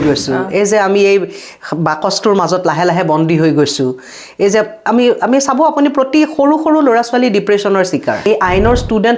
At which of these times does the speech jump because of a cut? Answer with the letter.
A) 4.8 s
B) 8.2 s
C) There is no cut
B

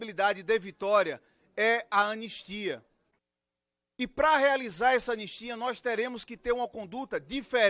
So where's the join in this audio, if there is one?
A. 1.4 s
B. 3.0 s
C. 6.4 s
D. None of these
D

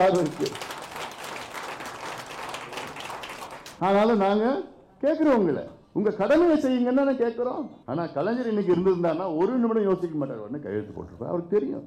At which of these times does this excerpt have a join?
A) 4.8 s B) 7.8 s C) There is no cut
B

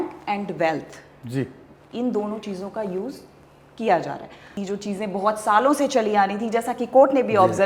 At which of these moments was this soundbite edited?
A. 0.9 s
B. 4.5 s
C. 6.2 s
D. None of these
B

